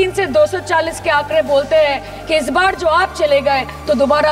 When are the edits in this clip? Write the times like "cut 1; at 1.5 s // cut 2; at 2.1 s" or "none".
none